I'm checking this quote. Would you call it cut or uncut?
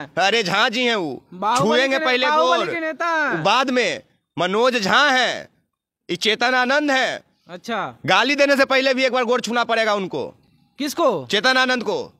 uncut